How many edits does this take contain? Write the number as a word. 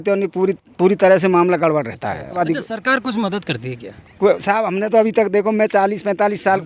one